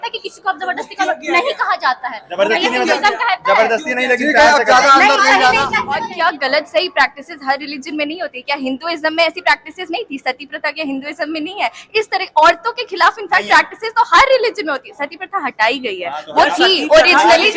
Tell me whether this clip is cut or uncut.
cut